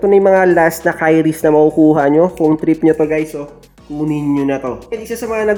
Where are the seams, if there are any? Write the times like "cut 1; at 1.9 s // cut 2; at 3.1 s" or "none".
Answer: none